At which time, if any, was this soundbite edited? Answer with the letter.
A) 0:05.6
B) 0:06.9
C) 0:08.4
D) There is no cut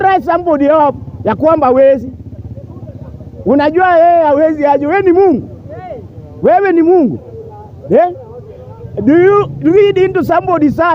D